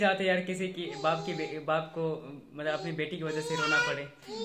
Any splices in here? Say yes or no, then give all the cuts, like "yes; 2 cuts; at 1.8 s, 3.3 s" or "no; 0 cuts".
no; 0 cuts